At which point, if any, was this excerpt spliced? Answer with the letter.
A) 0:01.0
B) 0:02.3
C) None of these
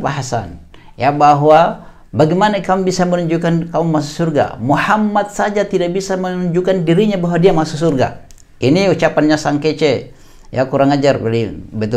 C